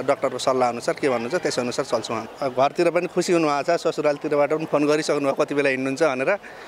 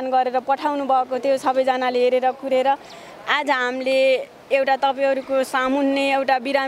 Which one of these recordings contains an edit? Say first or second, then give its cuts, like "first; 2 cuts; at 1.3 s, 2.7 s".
first; 1 cut; at 2.2 s